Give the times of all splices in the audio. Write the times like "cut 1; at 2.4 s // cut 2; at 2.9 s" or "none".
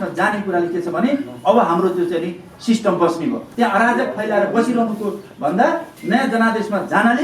cut 1; at 3.4 s // cut 2; at 5.9 s